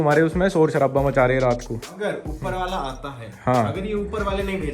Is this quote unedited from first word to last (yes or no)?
no